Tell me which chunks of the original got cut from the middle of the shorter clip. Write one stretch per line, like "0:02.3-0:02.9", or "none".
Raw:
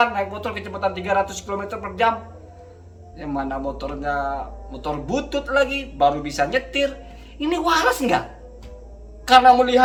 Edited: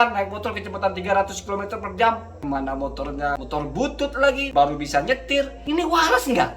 0:02.3-0:03.1
0:04.2-0:04.7
0:05.8-0:05.9
0:07.0-0:07.3